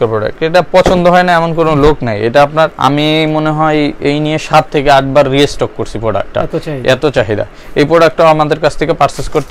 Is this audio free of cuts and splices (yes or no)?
yes